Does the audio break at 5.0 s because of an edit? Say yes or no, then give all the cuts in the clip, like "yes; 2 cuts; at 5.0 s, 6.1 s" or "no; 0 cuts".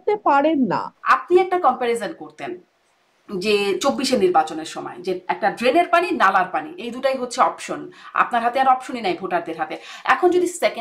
no; 1 cut; at 0.9 s